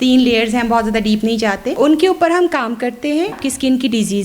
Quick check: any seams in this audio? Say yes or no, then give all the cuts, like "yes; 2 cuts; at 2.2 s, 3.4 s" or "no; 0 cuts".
yes; 2 cuts; at 1.7 s, 3.4 s